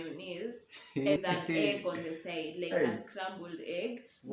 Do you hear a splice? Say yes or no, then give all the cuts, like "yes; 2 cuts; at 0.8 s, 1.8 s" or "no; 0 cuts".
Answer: yes; 1 cut; at 1.2 s